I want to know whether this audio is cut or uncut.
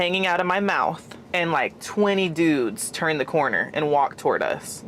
uncut